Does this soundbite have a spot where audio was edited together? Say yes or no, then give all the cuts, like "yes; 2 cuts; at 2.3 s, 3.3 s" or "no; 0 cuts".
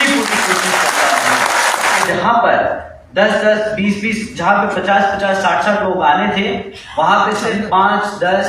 yes; 1 cut; at 2.1 s